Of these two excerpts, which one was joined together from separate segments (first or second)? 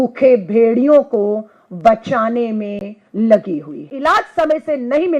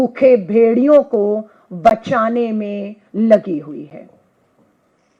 first